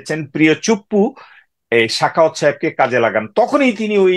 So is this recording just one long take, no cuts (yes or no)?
yes